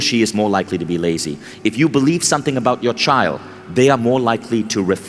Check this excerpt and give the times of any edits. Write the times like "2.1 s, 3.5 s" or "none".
none